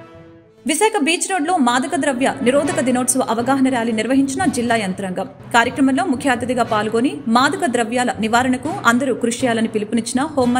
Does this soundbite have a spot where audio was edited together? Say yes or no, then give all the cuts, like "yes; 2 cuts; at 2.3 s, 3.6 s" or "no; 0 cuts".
no; 0 cuts